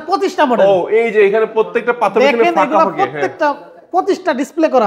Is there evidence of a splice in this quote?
no; 0 cuts

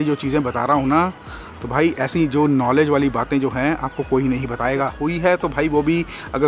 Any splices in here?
yes; 1 cut; at 5.0 s

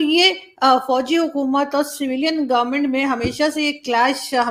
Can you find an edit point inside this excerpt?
no; 0 cuts

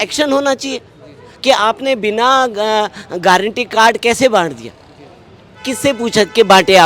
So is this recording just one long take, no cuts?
yes; 0 cuts

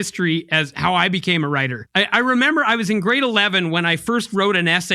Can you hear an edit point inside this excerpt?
yes; 1 cut; at 1.8 s

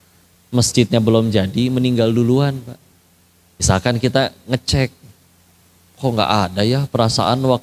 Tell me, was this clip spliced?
yes; 1 cut; at 3.6 s

